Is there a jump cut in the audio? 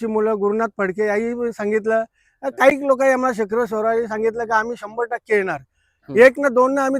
no; 0 cuts

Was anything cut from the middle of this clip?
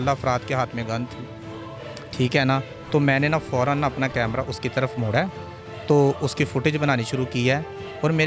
no; 0 cuts

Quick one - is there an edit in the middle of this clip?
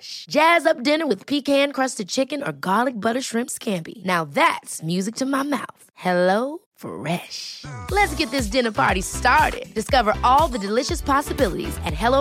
no; 0 cuts

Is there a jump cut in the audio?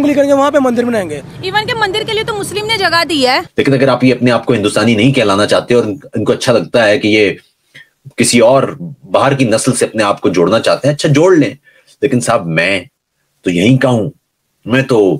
yes; 1 cut; at 3.5 s

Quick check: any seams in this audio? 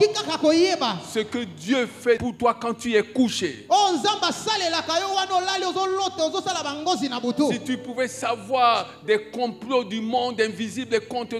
no; 0 cuts

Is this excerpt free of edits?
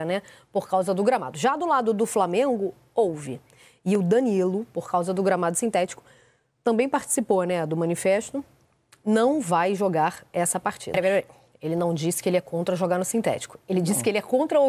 no; 1 cut; at 10.9 s

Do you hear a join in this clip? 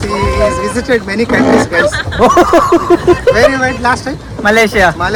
no; 0 cuts

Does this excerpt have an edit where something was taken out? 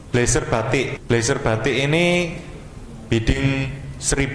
yes; 1 cut; at 0.9 s

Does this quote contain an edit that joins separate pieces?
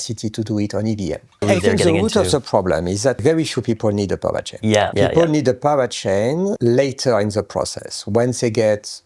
yes; 4 cuts; at 1.4 s, 3.2 s, 4.8 s, 6.6 s

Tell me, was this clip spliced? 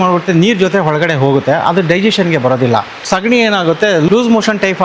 yes; 2 cuts; at 2.9 s, 4.1 s

